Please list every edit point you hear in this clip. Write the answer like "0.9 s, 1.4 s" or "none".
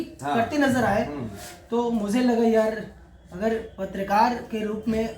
none